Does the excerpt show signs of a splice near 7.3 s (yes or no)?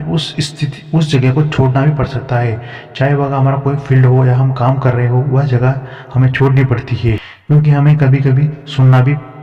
yes